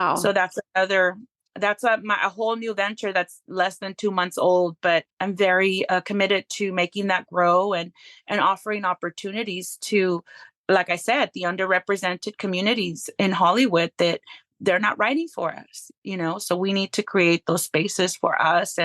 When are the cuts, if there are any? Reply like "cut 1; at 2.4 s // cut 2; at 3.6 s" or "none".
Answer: cut 1; at 5.1 s